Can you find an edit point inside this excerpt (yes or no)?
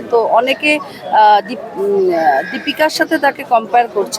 no